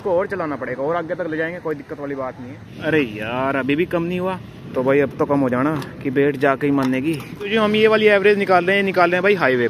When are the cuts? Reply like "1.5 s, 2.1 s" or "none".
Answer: 2.6 s, 4.5 s, 7.5 s